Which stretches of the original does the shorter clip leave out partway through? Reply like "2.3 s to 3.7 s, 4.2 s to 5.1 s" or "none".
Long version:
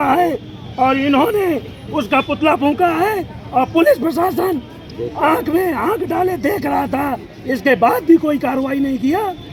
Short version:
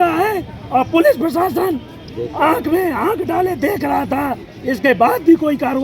none

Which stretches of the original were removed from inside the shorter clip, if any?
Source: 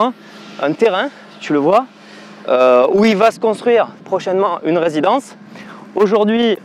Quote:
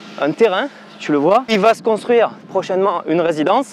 1.9 s to 3.1 s

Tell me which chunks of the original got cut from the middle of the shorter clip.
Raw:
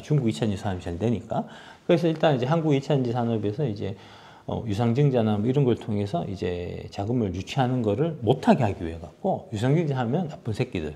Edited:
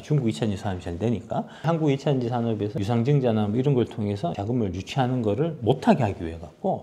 1.6 s to 2.4 s, 3.6 s to 4.6 s, 6.3 s to 7.0 s

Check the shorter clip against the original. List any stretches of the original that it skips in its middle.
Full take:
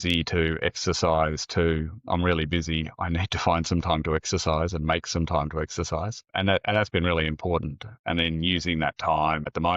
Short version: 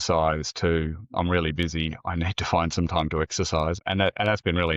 4.7 s to 6.3 s

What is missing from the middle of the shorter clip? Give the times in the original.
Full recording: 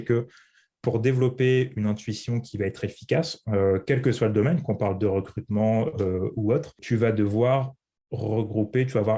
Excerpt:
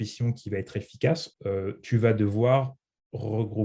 3.5 s to 6.4 s

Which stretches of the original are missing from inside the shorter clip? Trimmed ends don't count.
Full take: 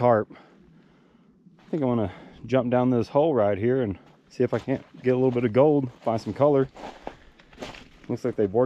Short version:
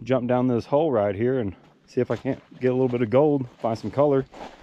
none

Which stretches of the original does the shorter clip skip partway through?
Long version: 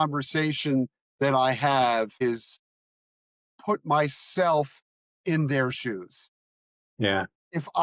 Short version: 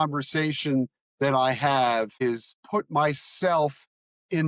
2.5 s to 3.4 s

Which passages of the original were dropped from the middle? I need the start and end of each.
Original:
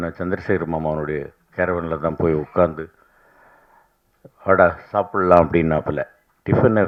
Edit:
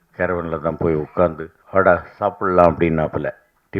2.9 s to 4.2 s

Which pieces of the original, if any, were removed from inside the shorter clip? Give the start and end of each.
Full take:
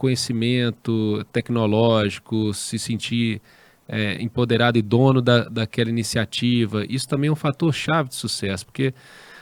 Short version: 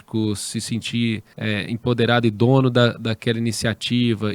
3.5 s to 3.8 s

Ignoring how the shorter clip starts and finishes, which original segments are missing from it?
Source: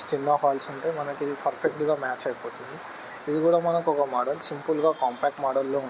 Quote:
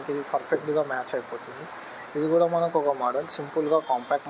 none

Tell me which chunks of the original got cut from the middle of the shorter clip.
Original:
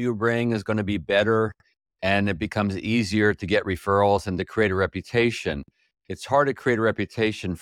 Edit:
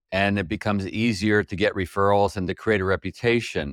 none

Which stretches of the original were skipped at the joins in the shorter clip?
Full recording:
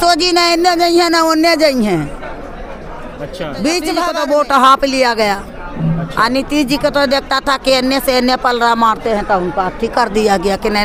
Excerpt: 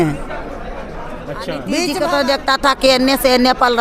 3.8 s to 6.7 s

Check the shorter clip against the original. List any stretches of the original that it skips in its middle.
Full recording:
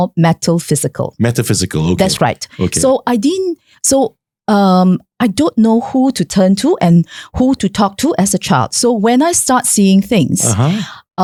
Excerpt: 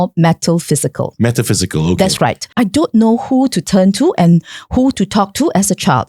2.4 s to 5.1 s

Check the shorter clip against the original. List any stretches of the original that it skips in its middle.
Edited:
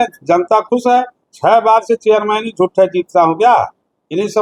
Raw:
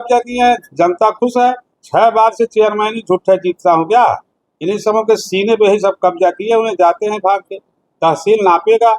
none

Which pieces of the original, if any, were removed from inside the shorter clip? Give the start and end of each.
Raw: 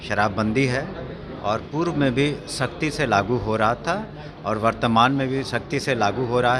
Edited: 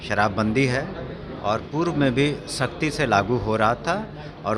none

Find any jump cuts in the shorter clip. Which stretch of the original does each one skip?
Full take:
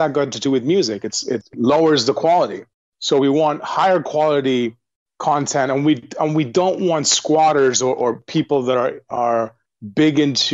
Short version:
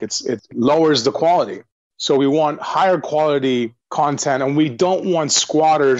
4.8 s to 5.1 s, 6.0 s to 6.5 s

